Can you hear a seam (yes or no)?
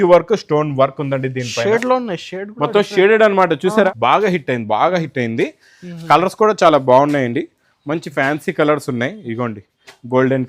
yes